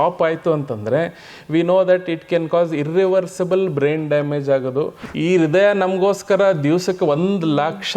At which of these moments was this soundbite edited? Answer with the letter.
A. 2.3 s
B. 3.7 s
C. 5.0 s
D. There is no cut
C